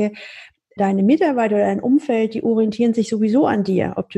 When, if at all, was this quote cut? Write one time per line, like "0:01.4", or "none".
none